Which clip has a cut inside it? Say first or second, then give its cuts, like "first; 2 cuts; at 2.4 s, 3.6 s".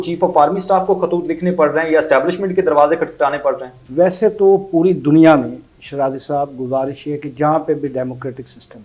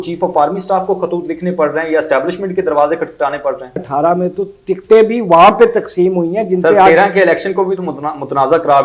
second; 1 cut; at 3.9 s